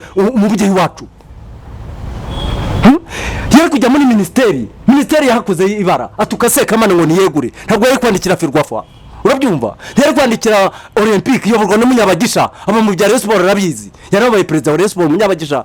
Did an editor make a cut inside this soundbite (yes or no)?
no